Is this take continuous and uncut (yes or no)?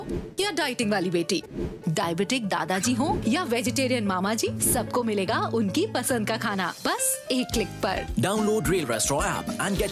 yes